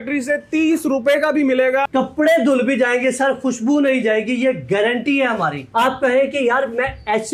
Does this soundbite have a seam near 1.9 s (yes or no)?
yes